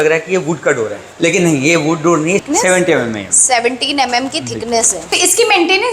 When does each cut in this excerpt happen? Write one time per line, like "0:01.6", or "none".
0:01.0
0:02.5
0:05.1